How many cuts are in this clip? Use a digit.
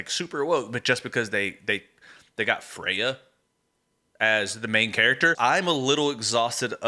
1